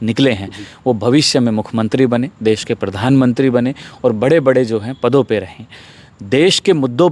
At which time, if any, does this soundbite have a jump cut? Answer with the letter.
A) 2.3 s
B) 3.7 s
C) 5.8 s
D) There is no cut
D